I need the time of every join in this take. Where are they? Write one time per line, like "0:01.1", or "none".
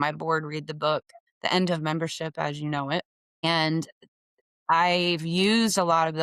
0:01.2
0:03.4